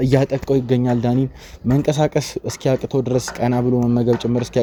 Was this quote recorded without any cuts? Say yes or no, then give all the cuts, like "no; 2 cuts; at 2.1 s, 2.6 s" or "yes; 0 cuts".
yes; 0 cuts